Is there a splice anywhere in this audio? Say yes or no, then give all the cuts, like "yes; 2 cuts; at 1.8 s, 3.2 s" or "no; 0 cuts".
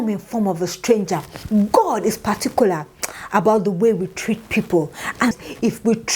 yes; 2 cuts; at 1.3 s, 5.3 s